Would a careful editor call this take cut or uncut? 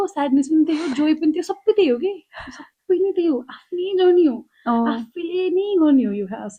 uncut